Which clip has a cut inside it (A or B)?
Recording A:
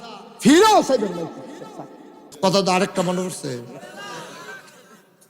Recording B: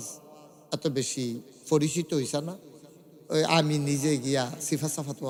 A